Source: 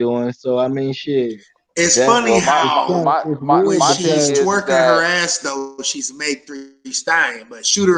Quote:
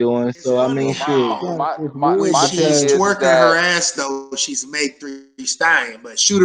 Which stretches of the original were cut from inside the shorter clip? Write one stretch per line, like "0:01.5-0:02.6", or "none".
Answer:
0:01.5-0:02.9